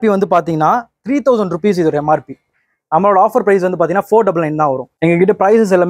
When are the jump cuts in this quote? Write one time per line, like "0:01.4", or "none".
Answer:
0:04.9

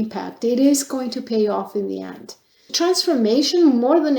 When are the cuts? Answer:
0:02.7

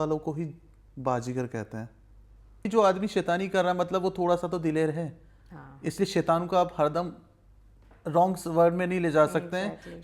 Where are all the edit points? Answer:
0:02.6

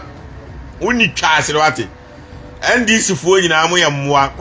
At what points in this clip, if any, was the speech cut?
none

